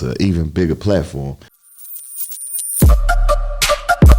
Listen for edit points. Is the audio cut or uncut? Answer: cut